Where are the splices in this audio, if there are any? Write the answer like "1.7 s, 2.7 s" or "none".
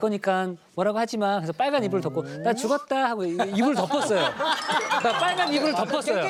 none